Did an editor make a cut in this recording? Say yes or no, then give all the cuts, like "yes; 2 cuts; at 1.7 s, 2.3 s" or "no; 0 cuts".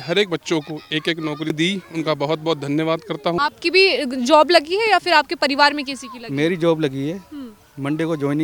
yes; 2 cuts; at 1.5 s, 3.4 s